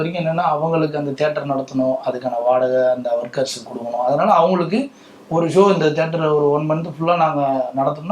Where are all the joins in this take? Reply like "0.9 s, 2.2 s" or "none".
none